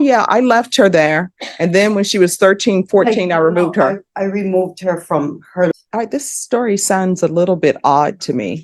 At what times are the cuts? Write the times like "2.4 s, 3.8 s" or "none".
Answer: 5.7 s